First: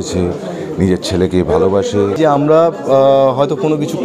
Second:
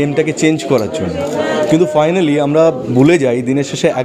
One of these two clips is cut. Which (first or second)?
first